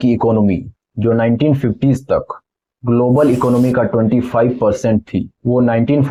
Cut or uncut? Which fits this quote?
uncut